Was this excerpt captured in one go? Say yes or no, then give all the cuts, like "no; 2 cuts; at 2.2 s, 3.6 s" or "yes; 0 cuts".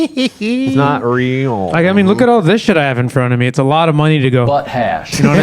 yes; 0 cuts